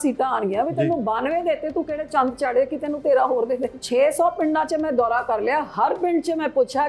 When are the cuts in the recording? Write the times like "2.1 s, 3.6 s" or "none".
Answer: 3.8 s